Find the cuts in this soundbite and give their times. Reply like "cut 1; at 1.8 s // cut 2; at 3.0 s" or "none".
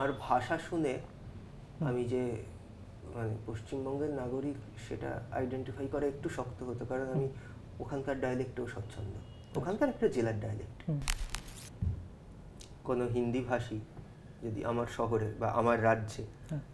cut 1; at 11.3 s